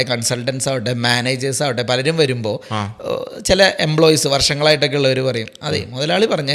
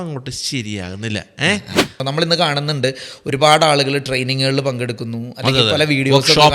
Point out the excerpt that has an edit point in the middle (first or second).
second